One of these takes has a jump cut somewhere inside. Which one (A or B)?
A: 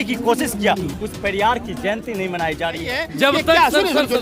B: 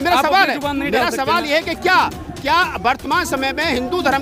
A